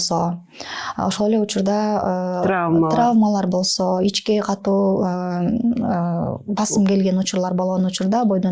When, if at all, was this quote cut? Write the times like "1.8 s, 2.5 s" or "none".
none